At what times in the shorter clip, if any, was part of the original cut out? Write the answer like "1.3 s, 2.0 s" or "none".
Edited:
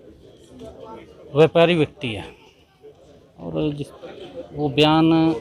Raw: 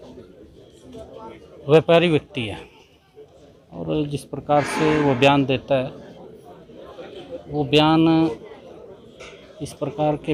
3.9 s